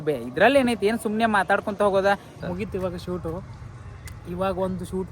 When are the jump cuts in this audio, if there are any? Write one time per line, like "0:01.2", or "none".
0:02.3